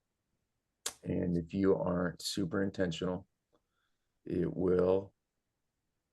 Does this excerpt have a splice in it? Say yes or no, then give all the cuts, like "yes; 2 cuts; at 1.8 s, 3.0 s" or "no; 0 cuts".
yes; 1 cut; at 4.1 s